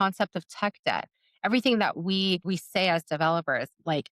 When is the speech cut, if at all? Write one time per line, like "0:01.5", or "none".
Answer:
0:02.5